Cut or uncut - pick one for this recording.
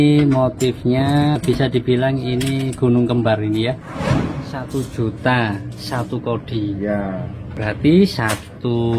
cut